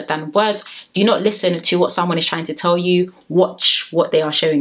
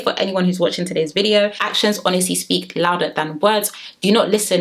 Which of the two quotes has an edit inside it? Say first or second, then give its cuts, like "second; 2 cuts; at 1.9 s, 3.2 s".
second; 1 cut; at 1.7 s